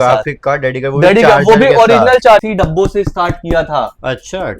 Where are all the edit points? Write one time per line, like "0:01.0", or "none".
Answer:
0:02.4